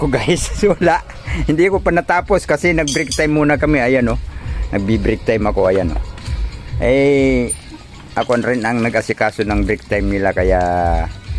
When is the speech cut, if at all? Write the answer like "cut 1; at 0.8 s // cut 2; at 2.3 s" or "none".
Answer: none